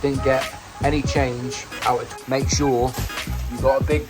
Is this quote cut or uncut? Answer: cut